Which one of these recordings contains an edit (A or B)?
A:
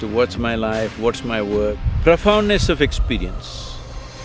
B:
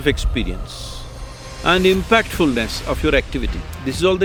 A